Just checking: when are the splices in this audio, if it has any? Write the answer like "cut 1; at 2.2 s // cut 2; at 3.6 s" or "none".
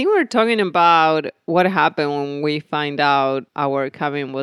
cut 1; at 3.5 s